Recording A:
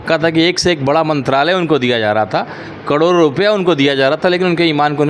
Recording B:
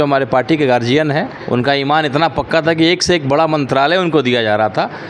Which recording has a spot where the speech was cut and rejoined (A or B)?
B